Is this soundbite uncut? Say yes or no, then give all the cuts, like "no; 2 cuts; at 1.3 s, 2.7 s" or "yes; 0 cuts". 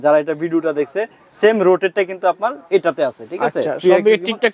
yes; 0 cuts